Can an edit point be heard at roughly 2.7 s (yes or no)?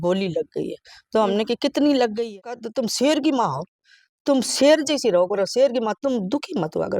yes